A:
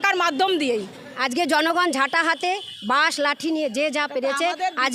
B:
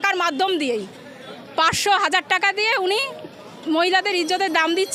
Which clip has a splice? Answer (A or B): A